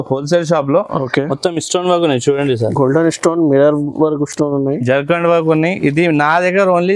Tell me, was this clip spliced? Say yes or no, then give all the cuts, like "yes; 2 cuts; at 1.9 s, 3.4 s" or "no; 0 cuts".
no; 0 cuts